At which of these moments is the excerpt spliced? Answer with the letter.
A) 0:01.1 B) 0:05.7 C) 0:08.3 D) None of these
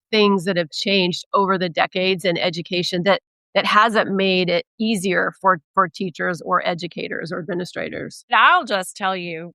C